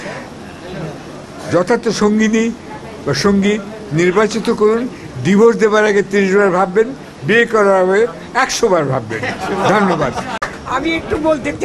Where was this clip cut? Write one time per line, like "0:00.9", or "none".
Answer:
0:10.4